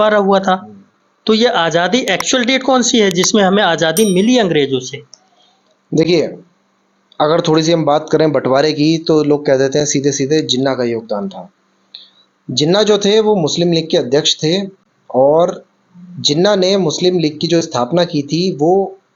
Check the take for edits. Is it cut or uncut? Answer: uncut